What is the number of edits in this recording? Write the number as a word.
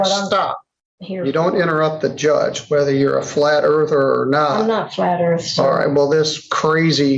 zero